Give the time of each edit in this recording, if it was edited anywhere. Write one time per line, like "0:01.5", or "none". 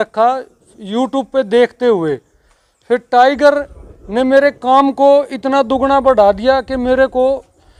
none